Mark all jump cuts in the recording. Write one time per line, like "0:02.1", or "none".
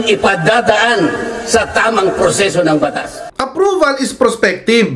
0:03.3